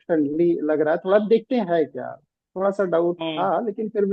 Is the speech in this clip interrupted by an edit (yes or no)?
no